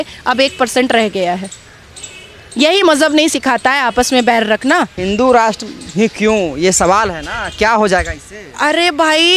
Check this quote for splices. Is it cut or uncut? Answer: cut